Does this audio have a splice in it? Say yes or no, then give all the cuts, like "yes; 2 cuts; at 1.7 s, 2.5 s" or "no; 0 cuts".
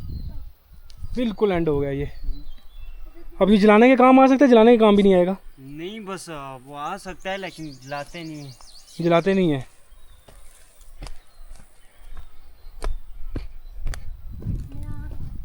no; 0 cuts